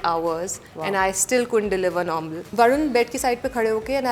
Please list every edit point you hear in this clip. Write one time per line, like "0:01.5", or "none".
0:02.5